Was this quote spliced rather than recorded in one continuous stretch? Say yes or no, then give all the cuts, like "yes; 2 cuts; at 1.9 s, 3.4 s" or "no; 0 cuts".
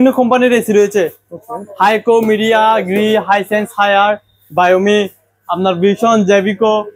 no; 0 cuts